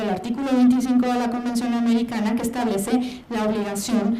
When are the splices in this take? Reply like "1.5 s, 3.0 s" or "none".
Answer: 1.6 s